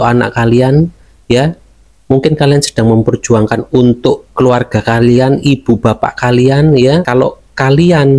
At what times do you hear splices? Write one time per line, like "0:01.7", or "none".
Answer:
0:07.1